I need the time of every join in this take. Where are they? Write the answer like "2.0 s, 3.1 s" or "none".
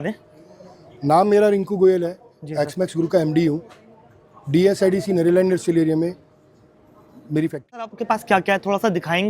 8.0 s